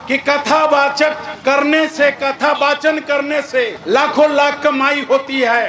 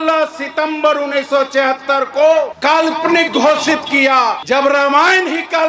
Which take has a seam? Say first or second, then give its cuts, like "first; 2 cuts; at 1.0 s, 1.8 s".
second; 2 cuts; at 2.5 s, 4.4 s